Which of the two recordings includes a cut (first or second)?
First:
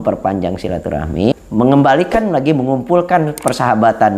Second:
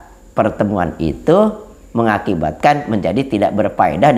first